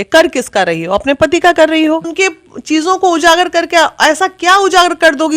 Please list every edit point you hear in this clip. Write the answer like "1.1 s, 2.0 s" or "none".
2.1 s